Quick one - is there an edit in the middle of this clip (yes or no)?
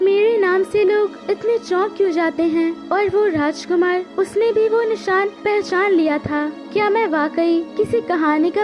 yes